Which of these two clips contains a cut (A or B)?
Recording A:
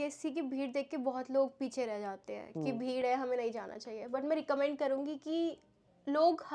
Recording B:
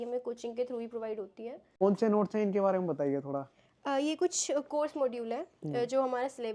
B